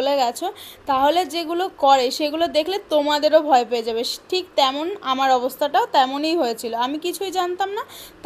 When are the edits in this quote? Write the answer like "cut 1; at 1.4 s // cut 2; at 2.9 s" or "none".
none